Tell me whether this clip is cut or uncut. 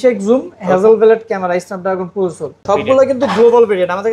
cut